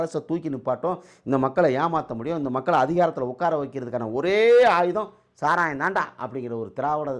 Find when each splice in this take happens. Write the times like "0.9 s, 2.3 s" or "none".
none